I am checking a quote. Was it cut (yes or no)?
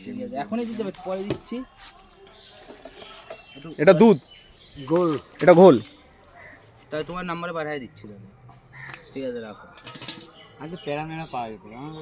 no